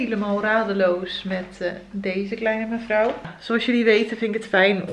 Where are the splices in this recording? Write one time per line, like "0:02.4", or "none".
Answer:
0:03.3